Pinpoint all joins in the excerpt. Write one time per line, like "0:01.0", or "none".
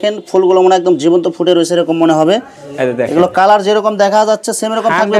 none